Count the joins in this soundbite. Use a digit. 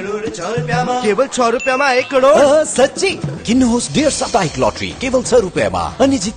0